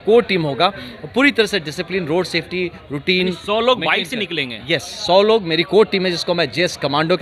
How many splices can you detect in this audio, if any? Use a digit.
0